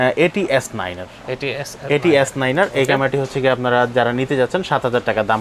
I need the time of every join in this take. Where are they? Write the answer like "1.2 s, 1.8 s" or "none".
none